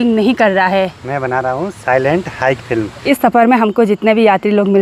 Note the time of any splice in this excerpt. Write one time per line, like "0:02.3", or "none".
0:03.0